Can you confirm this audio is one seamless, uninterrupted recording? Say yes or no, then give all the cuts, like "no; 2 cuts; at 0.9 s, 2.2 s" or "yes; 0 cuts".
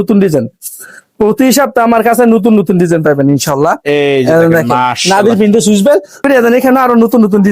no; 1 cut; at 6.2 s